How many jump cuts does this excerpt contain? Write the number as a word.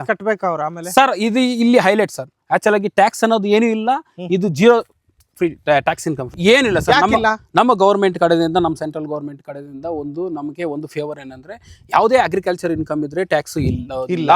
one